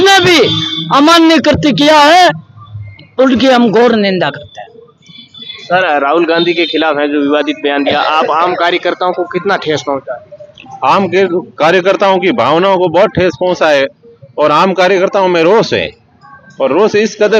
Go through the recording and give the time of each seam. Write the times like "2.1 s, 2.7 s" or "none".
none